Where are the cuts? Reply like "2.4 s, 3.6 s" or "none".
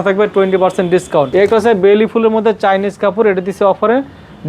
1.2 s